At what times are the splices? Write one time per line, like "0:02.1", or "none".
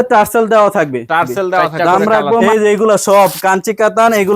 0:02.4